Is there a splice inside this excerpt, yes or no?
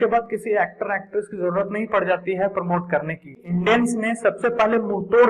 yes